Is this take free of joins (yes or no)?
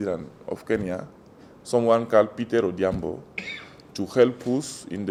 yes